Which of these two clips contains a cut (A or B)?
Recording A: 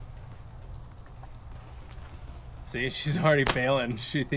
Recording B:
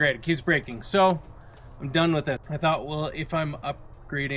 B